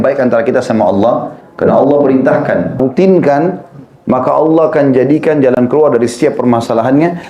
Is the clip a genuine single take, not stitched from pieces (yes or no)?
no